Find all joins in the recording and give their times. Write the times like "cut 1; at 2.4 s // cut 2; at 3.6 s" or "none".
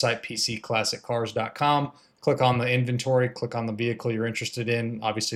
none

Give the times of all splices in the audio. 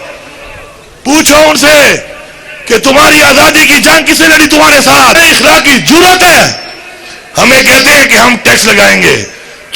cut 1; at 5.2 s

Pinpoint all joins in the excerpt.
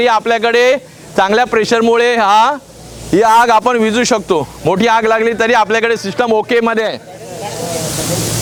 none

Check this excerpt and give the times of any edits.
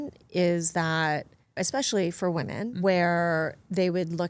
cut 1; at 1.6 s // cut 2; at 2.7 s

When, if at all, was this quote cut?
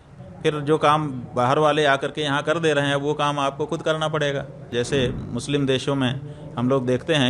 cut 1; at 4.7 s

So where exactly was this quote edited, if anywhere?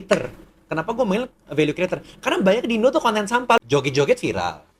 cut 1; at 3.6 s

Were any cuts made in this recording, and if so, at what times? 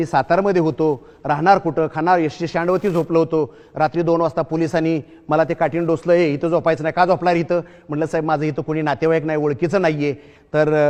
none

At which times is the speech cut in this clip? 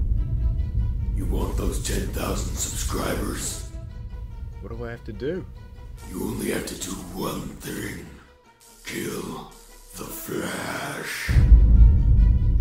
cut 1; at 11.2 s

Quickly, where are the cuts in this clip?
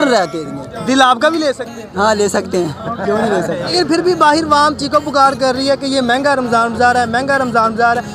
cut 1; at 3.7 s

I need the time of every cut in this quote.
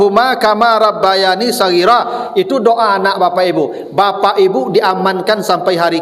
none

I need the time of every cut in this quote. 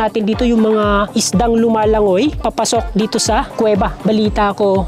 cut 1; at 4.0 s

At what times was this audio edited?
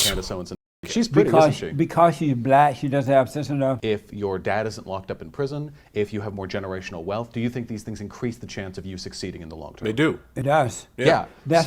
cut 1; at 3.8 s

